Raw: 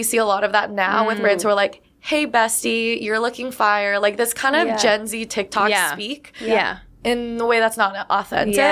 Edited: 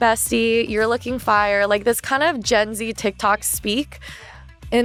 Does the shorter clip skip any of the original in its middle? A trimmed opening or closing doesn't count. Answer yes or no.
no